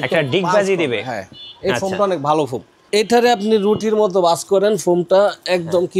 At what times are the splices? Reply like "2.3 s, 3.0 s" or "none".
2.9 s